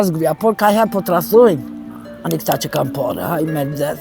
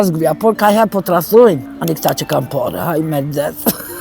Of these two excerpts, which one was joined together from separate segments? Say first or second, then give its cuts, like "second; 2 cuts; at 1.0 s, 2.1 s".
second; 1 cut; at 1.7 s